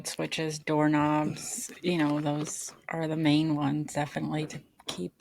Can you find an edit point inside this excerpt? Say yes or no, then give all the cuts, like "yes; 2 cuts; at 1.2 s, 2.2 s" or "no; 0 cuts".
no; 0 cuts